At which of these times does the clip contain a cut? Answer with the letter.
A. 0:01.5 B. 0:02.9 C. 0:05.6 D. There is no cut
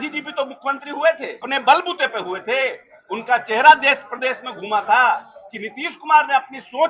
A